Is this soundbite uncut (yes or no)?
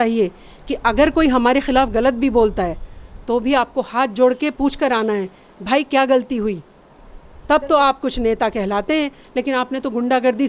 yes